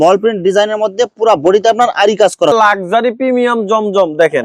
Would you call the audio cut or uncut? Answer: cut